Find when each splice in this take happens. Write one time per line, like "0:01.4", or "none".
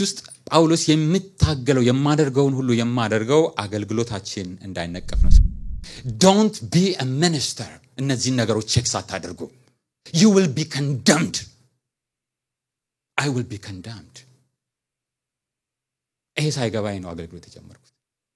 0:05.3